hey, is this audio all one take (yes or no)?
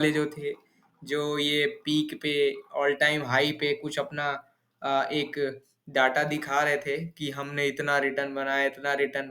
yes